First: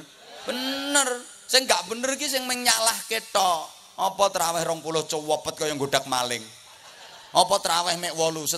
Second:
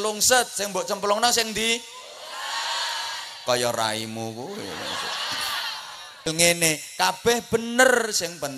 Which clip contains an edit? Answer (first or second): second